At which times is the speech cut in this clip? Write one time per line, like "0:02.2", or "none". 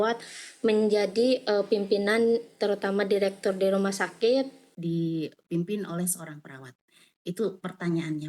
0:04.6